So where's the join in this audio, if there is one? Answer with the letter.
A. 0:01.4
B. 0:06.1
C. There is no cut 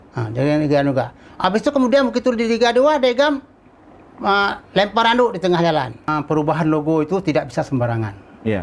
B